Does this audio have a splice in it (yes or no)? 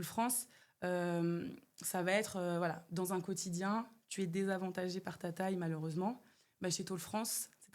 no